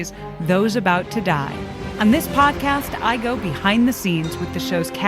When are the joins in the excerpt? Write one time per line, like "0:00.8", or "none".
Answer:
0:01.8